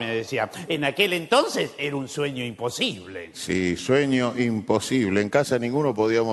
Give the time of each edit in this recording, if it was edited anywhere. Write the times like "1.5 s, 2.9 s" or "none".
none